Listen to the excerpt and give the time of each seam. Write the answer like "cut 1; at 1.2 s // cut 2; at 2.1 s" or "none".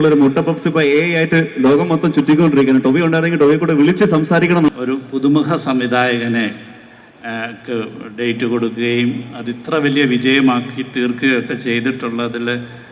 cut 1; at 4.7 s